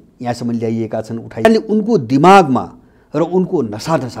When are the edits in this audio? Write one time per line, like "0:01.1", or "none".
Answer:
0:01.5